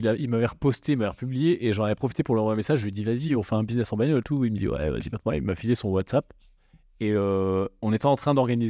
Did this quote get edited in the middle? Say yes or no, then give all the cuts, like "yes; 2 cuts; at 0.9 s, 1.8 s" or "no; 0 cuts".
no; 0 cuts